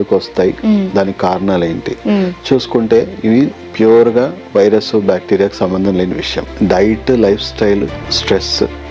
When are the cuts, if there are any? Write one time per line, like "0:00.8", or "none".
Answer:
0:06.5